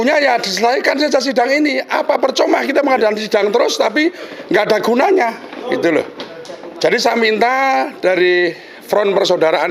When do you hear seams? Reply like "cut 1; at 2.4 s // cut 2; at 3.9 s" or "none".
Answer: none

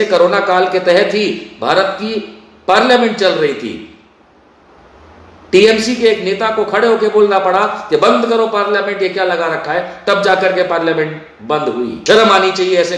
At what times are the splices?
cut 1; at 12.0 s

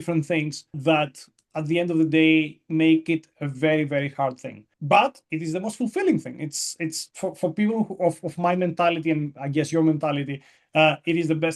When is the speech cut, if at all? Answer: none

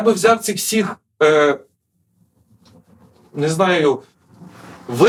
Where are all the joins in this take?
none

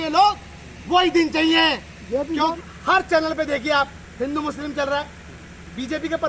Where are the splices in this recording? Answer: cut 1; at 2.5 s

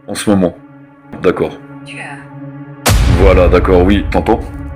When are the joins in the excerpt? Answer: cut 1; at 1.2 s

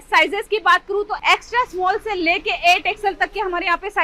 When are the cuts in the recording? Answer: cut 1; at 1.2 s

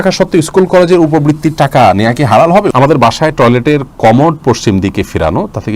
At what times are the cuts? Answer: cut 1; at 2.7 s

